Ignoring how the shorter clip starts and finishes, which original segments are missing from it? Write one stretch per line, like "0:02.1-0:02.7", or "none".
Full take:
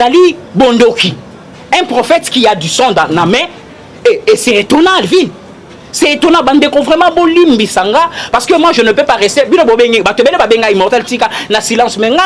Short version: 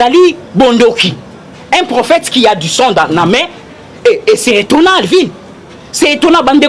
none